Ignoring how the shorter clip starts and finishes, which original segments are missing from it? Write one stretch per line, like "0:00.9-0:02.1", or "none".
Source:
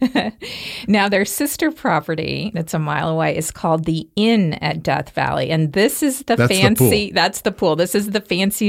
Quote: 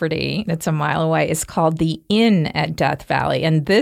none